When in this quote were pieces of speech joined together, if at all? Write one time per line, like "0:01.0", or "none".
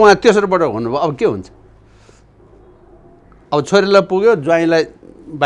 none